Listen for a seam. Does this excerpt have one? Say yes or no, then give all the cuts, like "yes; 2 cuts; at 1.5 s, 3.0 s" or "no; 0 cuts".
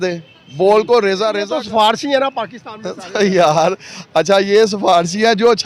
yes; 1 cut; at 1.4 s